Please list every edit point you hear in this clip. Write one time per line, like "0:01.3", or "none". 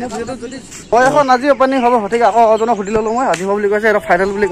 0:00.9